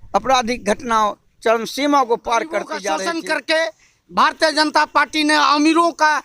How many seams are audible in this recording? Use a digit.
1